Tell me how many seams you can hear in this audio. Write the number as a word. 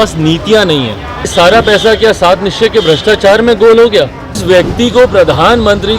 two